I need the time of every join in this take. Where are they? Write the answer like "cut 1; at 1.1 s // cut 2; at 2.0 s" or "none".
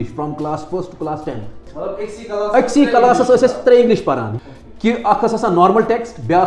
cut 1; at 1.7 s // cut 2; at 4.3 s